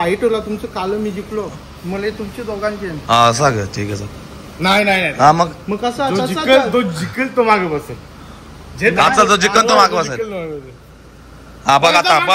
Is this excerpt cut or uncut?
uncut